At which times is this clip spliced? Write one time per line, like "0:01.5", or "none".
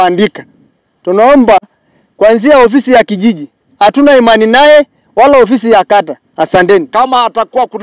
0:06.8

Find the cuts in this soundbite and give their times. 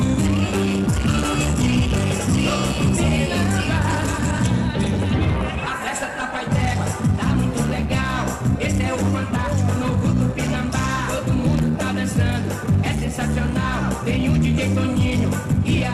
none

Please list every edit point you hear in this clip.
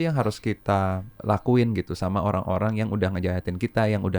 0:01.1

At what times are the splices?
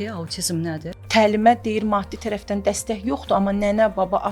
0:00.9

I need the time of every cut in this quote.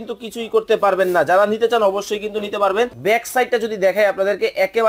0:03.0

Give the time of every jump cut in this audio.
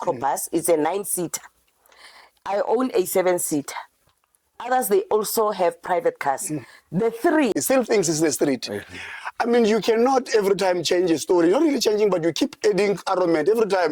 0:07.5

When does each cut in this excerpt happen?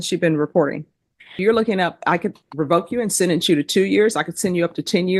0:01.4

